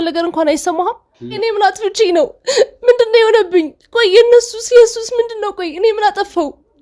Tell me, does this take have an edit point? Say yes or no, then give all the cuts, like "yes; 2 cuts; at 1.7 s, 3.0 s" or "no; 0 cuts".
yes; 1 cut; at 1.2 s